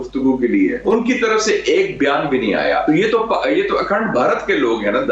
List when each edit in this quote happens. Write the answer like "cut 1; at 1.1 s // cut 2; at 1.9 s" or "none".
cut 1; at 0.8 s // cut 2; at 2.8 s